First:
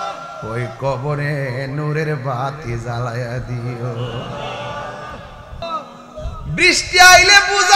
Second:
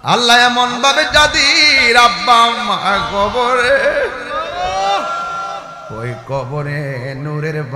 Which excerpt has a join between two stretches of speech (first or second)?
first